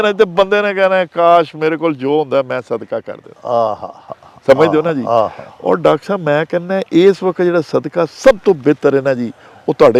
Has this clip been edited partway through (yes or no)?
no